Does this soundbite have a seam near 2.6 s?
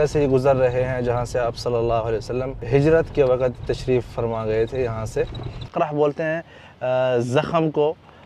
yes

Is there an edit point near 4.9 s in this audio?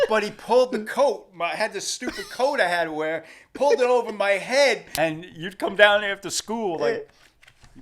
yes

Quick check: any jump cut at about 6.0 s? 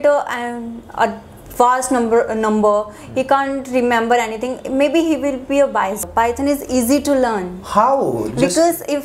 yes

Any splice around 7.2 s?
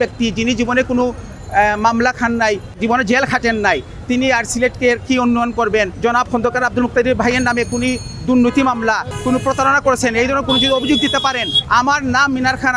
no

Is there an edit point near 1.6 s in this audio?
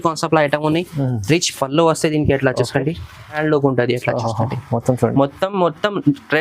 no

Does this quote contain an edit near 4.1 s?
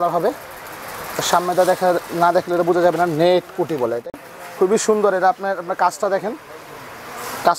yes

